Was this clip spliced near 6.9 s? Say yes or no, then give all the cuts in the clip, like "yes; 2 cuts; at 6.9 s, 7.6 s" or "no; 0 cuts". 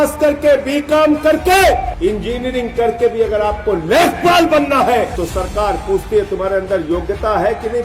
no; 2 cuts; at 1.9 s, 5.1 s